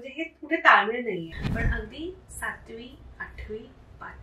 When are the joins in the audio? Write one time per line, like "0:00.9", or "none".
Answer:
0:01.4